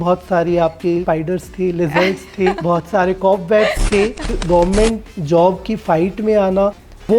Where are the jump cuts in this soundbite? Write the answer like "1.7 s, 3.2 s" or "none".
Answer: 1.0 s, 2.6 s, 4.4 s